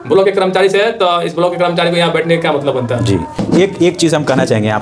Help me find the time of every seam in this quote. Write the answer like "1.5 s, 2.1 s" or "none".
3.4 s